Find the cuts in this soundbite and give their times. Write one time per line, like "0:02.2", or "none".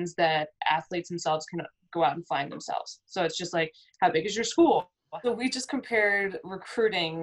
0:05.0